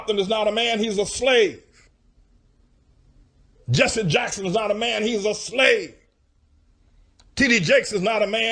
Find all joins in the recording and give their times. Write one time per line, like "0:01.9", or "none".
none